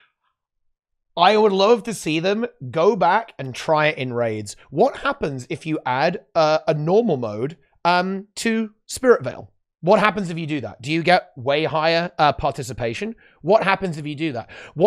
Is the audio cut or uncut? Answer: uncut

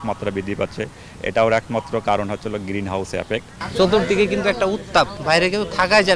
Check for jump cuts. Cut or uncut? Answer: cut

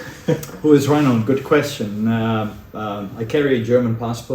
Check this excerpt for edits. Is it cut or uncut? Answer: uncut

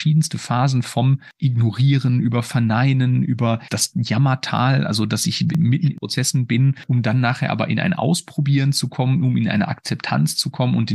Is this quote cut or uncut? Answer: cut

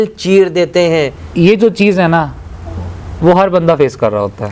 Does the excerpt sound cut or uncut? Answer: cut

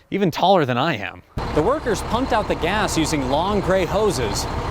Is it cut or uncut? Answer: cut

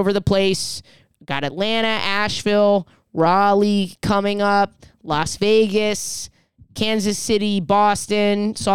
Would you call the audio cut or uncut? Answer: uncut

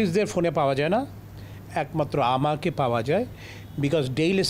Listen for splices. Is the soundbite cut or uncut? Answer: uncut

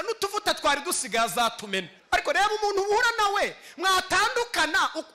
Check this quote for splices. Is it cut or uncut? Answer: cut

